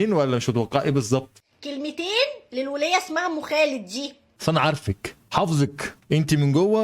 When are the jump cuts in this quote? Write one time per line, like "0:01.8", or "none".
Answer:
0:01.4